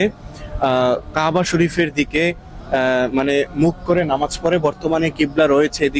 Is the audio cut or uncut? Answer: uncut